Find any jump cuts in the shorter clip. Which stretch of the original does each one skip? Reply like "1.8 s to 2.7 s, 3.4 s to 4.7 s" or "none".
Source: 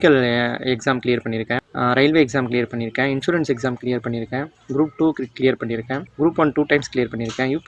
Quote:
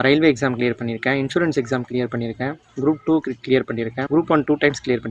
5.9 s to 6.1 s